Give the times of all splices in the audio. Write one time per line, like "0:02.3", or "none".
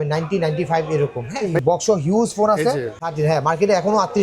0:01.5
0:03.0